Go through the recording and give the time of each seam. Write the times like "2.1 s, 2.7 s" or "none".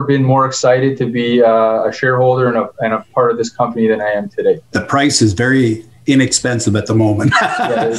4.7 s